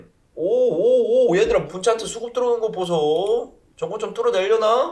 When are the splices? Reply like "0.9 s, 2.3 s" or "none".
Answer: none